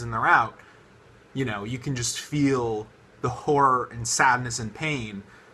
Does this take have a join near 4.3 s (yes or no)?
yes